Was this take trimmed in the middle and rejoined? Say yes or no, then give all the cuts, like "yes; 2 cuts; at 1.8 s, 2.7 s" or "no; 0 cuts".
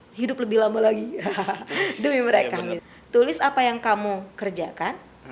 yes; 1 cut; at 2.8 s